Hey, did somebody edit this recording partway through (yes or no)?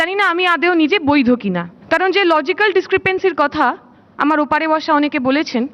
yes